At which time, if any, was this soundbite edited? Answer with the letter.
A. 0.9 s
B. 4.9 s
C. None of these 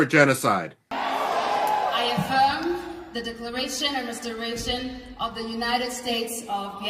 A